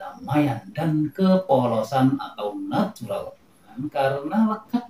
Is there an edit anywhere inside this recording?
yes; 1 cut; at 3.8 s

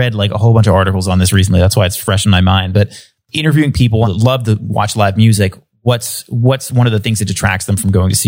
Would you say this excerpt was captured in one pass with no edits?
no; 2 cuts; at 3.2 s, 4.1 s

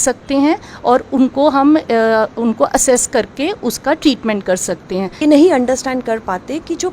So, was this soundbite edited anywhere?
yes; 1 cut; at 5.2 s

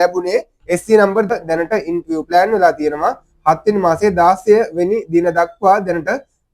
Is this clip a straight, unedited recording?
no; 1 cut; at 1.3 s

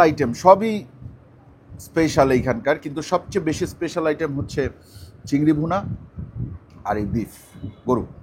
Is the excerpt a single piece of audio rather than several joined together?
yes; 0 cuts

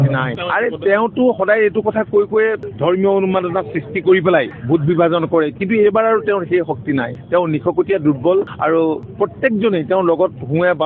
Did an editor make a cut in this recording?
no; 0 cuts

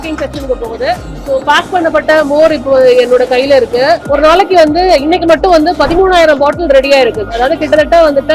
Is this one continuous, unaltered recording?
no; 2 cuts; at 1.1 s, 4.0 s

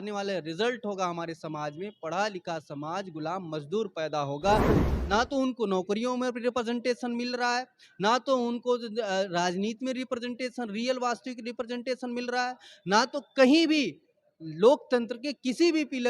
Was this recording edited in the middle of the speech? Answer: yes; 1 cut; at 4.8 s

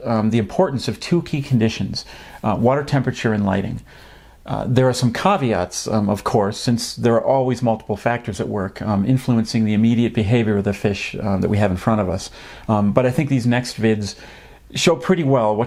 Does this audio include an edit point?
no; 0 cuts

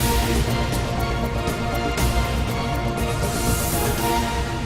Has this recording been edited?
no; 0 cuts

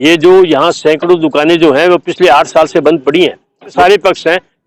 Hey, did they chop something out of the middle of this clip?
yes; 1 cut; at 3.7 s

